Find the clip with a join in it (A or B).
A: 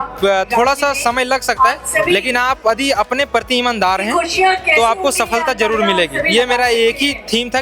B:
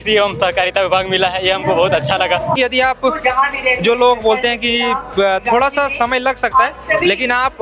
B